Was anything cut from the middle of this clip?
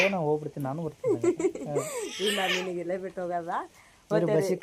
no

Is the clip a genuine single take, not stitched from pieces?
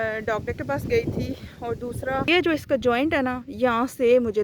no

